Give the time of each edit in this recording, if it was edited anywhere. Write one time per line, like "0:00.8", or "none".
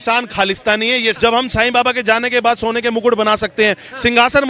0:01.2